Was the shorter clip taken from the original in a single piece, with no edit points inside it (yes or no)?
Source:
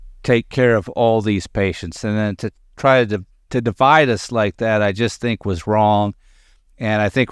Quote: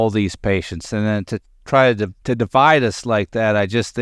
no